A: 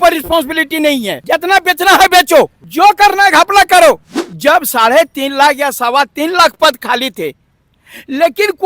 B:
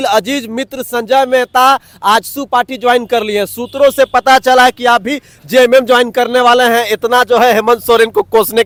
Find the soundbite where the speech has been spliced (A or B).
A